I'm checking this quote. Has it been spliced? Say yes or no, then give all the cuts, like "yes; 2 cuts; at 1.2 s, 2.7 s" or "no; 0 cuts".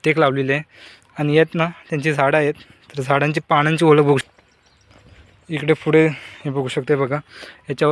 yes; 1 cut; at 4.2 s